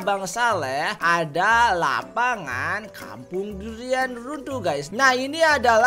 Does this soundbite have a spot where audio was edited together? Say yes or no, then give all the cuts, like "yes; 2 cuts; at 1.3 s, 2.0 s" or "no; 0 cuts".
yes; 1 cut; at 4.9 s